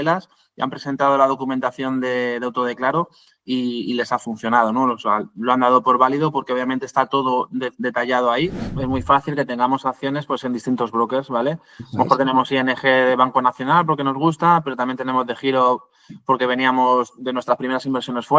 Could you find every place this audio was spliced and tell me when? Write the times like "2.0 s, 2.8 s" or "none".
8.7 s